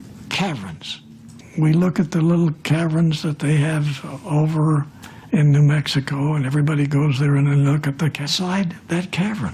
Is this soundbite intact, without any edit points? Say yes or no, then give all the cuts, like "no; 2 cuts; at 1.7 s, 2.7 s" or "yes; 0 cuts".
yes; 0 cuts